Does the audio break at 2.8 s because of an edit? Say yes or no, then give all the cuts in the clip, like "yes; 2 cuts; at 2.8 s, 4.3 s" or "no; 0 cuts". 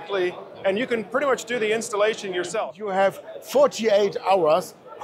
yes; 1 cut; at 2.8 s